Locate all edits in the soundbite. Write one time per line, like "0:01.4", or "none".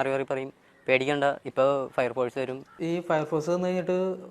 0:02.6